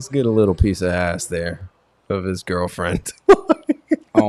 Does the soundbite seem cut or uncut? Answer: uncut